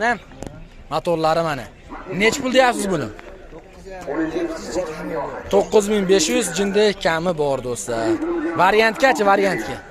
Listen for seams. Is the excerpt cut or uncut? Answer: uncut